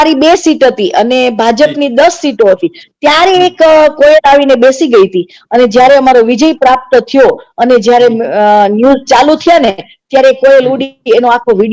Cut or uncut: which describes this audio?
uncut